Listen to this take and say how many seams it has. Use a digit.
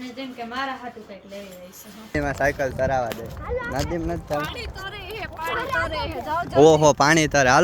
1